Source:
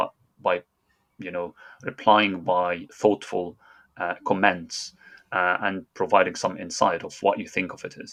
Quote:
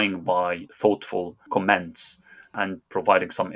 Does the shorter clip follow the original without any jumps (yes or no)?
no